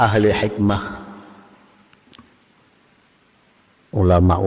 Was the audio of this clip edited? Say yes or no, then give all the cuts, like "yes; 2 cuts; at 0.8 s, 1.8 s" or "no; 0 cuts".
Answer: no; 0 cuts